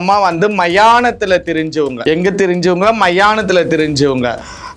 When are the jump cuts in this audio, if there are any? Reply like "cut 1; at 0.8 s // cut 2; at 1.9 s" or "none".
cut 1; at 2.0 s